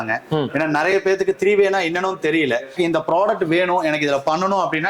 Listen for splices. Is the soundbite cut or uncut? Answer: cut